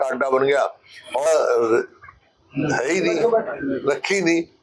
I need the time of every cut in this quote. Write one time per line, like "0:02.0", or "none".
0:01.3